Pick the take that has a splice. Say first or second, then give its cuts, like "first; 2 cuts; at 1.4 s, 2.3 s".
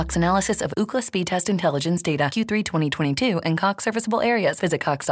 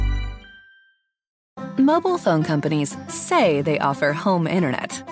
second; 1 cut; at 1.4 s